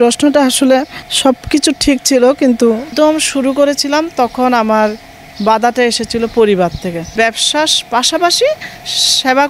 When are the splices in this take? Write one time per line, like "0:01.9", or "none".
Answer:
0:01.0
0:02.9
0:07.1